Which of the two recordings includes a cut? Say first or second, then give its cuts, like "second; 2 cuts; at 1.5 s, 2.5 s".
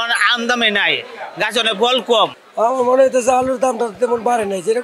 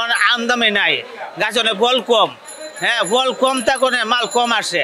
first; 1 cut; at 2.4 s